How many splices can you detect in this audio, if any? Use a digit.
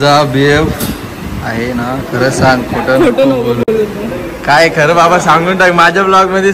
0